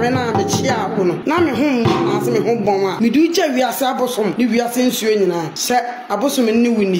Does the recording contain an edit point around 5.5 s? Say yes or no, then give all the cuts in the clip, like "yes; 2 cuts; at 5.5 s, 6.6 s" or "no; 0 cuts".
yes; 4 cuts; at 1.2 s, 2.9 s, 4.3 s, 5.5 s